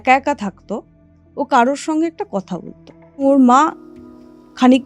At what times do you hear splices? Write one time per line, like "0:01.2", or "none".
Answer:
0:03.2